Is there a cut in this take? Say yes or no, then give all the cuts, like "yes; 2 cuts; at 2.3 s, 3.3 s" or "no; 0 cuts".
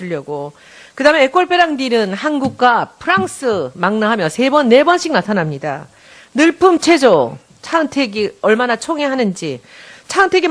yes; 1 cut; at 6.0 s